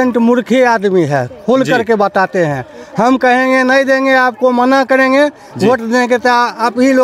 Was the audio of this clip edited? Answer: no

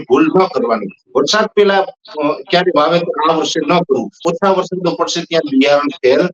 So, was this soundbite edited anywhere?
yes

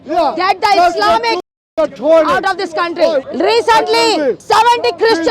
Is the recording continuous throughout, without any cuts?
no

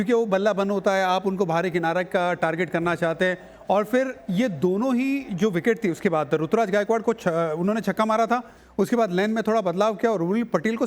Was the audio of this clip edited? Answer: no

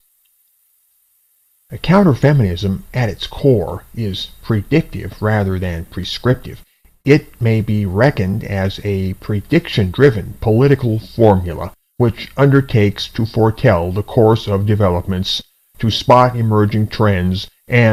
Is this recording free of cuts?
yes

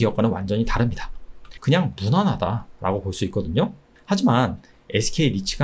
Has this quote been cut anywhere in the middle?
yes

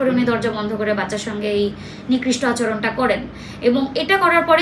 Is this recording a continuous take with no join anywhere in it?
yes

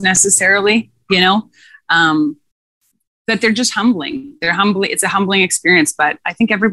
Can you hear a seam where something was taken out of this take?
no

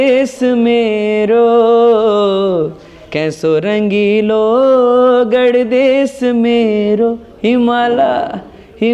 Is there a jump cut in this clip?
no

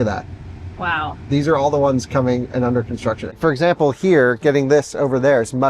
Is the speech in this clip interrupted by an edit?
yes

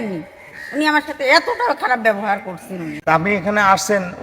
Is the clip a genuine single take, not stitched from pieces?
no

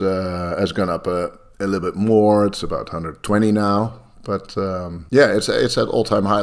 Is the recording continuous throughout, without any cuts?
no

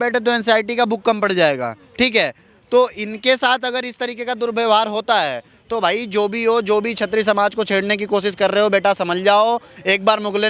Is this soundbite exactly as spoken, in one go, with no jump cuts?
yes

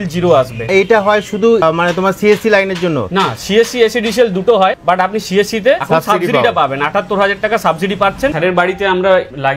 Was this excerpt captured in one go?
yes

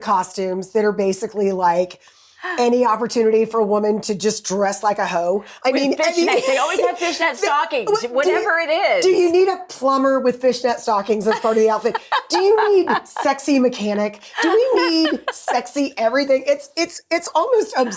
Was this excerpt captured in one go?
yes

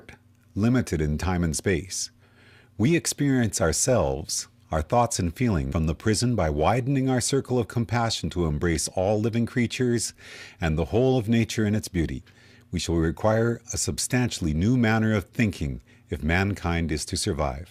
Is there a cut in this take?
no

